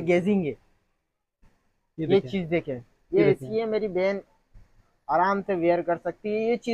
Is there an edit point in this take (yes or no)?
no